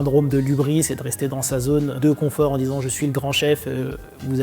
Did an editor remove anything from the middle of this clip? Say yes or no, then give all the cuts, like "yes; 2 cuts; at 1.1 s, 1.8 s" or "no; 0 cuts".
yes; 1 cut; at 1.9 s